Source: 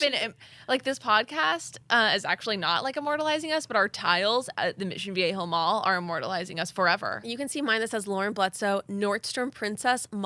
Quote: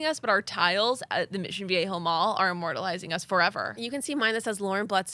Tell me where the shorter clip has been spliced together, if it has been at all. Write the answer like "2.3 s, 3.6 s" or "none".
none